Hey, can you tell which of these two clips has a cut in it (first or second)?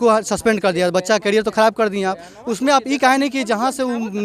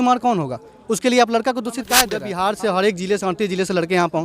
second